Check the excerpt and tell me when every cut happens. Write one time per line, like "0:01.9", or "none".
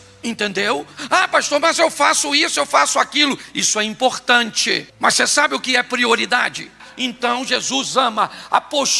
0:06.8